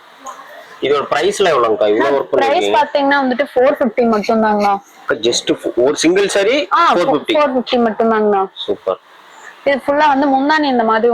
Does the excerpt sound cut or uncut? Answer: uncut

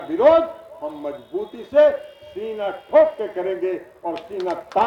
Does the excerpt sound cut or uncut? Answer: uncut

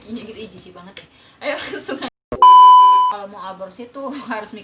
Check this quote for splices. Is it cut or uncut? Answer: cut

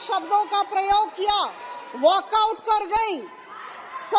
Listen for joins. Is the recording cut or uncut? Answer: uncut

